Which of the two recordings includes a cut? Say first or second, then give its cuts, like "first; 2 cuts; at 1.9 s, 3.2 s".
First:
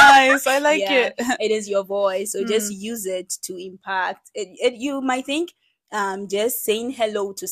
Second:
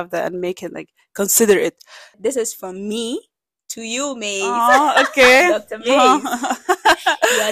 second; 1 cut; at 2.1 s